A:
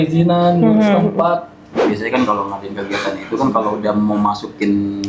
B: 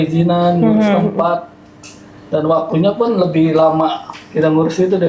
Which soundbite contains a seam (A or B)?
A